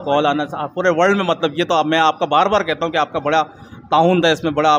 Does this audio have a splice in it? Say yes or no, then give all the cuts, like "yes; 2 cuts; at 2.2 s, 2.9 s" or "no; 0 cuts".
no; 0 cuts